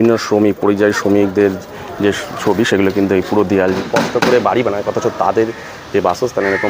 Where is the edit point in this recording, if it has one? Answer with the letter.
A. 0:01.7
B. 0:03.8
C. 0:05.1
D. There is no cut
B